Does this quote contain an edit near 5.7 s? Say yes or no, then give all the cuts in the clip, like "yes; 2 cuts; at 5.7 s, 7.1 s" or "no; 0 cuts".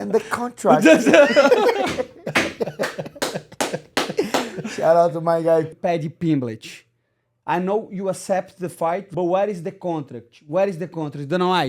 yes; 2 cuts; at 5.7 s, 9.1 s